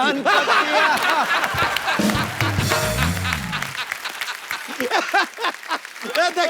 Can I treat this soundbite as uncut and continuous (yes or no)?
yes